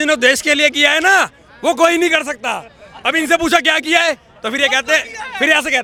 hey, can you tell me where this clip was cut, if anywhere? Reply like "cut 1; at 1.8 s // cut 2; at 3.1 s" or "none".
none

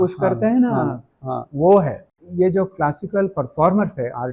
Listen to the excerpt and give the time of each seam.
cut 1; at 2.2 s

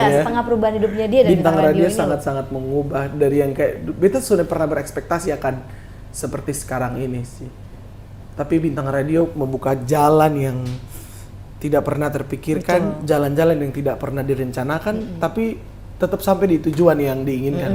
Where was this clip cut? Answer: none

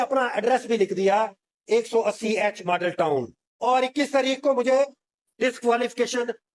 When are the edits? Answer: cut 1; at 3.4 s

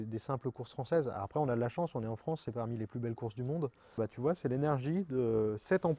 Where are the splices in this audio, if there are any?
cut 1; at 3.9 s

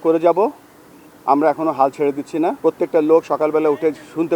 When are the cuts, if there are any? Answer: cut 1; at 2.6 s

